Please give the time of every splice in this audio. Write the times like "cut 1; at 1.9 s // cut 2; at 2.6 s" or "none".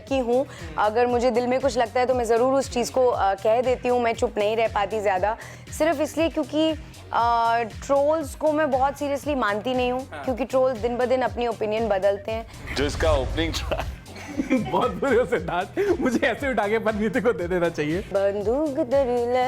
cut 1; at 5.6 s // cut 2; at 7.8 s // cut 3; at 12.5 s // cut 4; at 18.1 s